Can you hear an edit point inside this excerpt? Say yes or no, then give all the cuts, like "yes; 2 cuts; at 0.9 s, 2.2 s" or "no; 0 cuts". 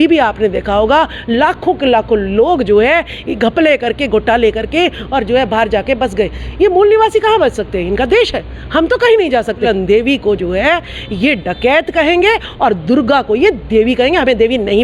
yes; 1 cut; at 9.7 s